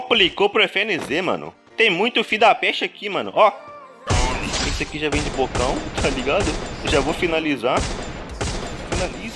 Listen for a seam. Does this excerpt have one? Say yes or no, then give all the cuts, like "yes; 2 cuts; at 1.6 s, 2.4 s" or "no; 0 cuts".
no; 0 cuts